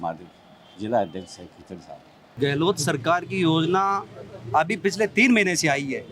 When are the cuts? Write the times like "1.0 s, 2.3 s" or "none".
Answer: 2.4 s